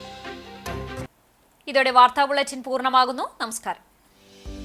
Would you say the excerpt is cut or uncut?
uncut